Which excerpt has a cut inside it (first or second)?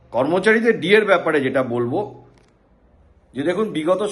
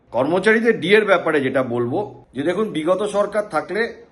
second